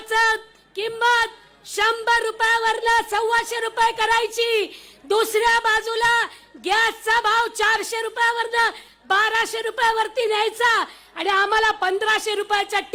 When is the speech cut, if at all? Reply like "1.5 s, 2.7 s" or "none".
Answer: none